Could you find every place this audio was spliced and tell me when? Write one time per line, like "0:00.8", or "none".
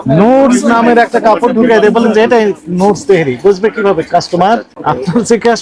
0:04.7

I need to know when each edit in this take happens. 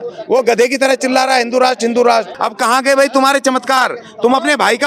0:02.4

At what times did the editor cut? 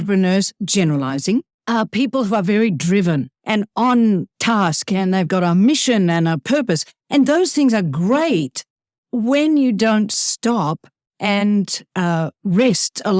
0:01.6
0:03.3

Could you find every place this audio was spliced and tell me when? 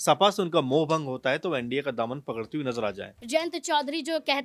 0:03.1

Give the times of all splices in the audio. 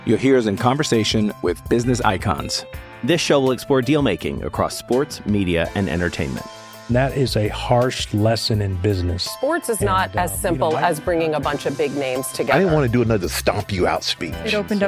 none

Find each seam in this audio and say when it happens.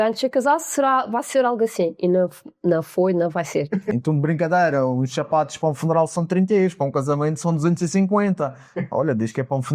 0:03.9

